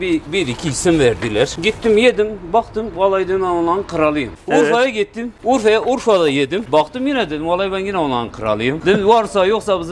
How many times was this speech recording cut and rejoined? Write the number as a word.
five